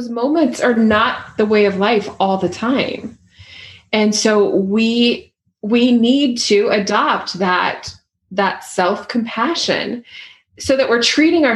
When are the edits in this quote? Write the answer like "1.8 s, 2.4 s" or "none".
none